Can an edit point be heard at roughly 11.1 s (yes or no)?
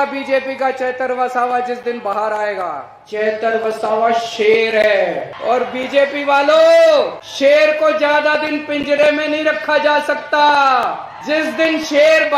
yes